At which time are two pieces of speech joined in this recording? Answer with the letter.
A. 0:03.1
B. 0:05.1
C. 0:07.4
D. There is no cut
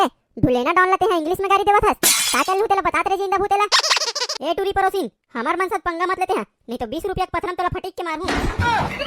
D